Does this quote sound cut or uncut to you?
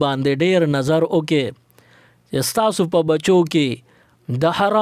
uncut